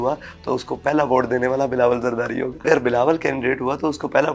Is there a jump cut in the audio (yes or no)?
yes